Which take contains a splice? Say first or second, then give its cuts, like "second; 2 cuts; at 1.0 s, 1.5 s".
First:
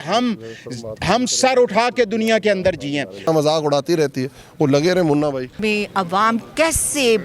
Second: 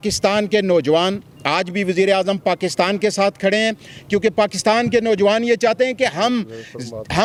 first; 2 cuts; at 3.2 s, 5.5 s